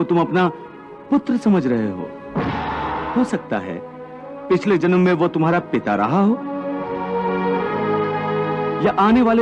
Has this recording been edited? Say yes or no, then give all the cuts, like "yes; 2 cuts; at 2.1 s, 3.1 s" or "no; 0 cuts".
yes; 1 cut; at 3.1 s